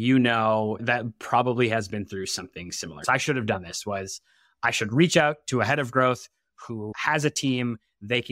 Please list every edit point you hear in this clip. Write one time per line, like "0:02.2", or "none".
0:03.0
0:06.9